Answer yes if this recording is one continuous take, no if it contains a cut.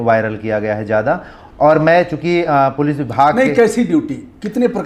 yes